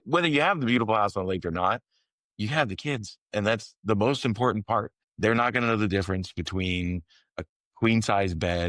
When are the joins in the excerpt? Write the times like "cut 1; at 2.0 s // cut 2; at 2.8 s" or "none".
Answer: cut 1; at 5.0 s